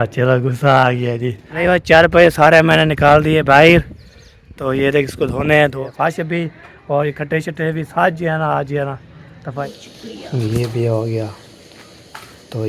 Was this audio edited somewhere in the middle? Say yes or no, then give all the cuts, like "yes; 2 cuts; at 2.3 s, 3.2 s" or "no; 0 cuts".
yes; 3 cuts; at 1.5 s, 5.8 s, 9.6 s